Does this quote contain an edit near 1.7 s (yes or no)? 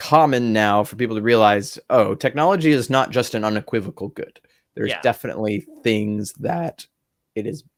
no